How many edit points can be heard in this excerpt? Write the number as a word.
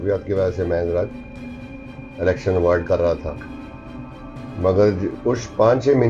zero